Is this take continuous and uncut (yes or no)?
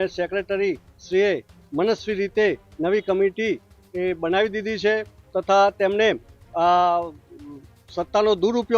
yes